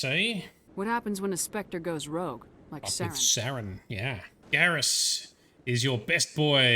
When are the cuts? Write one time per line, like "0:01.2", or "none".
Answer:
0:04.4